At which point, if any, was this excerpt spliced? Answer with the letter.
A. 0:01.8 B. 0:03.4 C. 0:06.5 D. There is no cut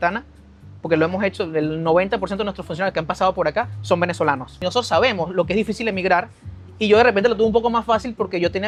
D